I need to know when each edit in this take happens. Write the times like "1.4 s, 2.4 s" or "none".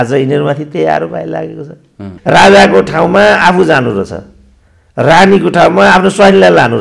2.1 s